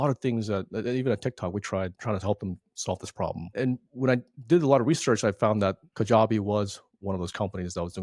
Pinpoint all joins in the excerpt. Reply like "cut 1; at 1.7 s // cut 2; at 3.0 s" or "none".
cut 1; at 3.4 s